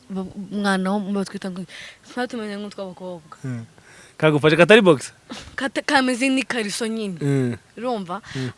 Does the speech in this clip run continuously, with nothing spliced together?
yes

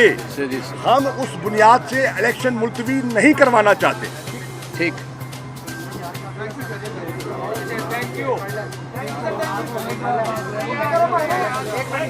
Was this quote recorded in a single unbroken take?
yes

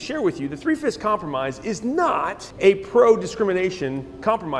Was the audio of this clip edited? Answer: yes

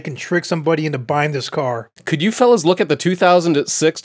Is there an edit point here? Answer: yes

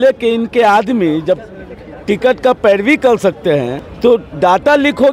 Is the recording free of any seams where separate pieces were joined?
no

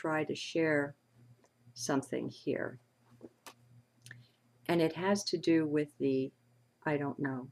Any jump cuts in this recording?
yes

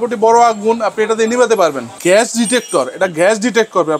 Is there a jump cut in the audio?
yes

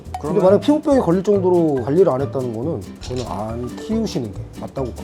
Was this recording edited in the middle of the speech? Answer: no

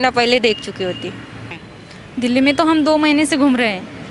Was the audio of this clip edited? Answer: yes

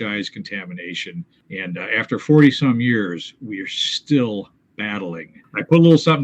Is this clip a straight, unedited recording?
no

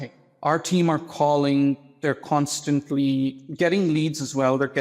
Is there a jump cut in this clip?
yes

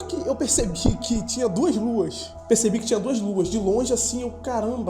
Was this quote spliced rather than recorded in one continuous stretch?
yes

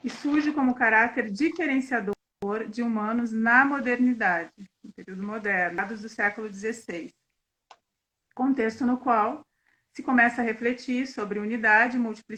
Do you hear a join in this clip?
no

